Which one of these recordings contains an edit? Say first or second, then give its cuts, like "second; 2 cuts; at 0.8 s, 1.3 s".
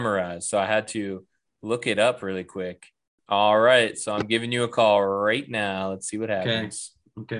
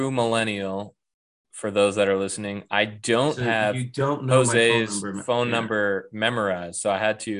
first; 1 cut; at 3.1 s